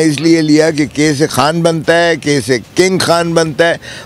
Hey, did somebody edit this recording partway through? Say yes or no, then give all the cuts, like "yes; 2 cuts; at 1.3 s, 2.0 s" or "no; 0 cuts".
yes; 2 cuts; at 1.3 s, 2.7 s